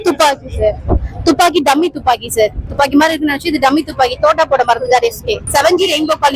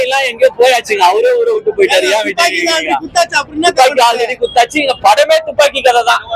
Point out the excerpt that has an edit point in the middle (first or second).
first